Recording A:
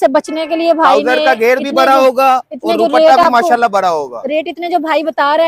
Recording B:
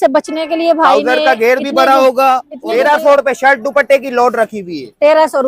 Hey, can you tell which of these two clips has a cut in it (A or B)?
B